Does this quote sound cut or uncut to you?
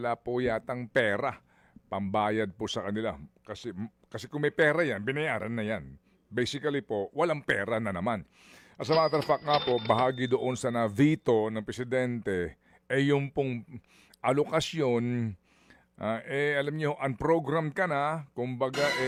uncut